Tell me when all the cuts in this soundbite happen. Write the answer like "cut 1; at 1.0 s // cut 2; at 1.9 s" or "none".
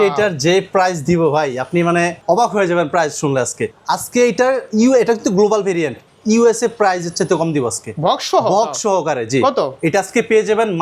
cut 1; at 2.2 s // cut 2; at 3.7 s